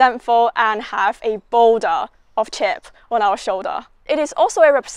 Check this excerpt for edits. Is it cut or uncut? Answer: cut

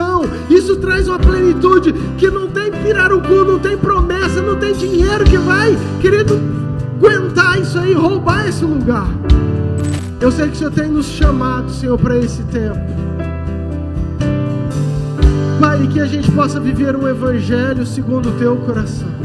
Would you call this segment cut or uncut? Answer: cut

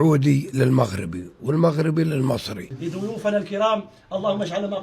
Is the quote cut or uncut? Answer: cut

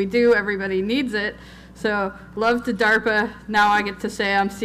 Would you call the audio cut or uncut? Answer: cut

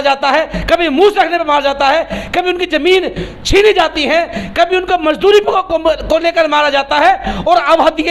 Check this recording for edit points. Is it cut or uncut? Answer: uncut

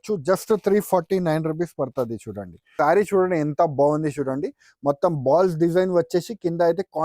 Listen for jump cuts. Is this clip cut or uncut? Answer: cut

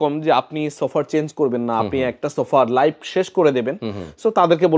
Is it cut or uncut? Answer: uncut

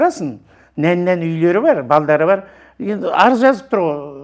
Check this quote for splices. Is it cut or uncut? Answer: uncut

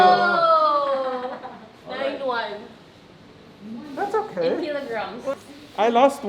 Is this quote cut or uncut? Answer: cut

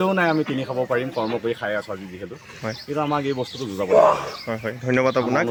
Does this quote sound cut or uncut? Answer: uncut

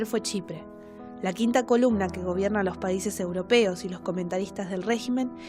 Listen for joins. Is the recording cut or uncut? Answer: cut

